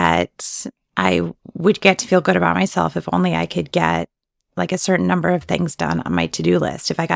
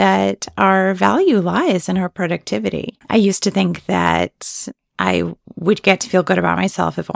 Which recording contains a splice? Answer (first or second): second